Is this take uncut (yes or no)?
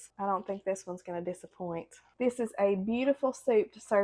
no